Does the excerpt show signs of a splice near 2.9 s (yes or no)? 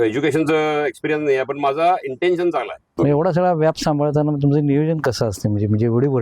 yes